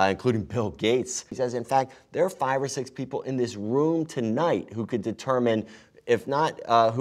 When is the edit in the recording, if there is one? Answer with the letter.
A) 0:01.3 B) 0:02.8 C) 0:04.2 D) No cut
A